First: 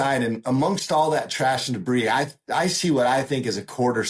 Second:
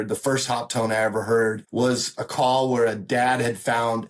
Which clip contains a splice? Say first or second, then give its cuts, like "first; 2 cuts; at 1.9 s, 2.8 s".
second; 1 cut; at 1.6 s